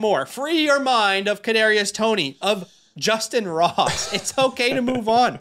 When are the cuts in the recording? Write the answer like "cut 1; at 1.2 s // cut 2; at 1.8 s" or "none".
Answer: none